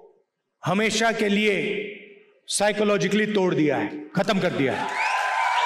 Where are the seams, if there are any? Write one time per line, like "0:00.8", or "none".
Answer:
none